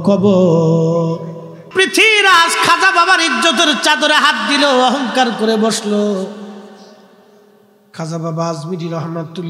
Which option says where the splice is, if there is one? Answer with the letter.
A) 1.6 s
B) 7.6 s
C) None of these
A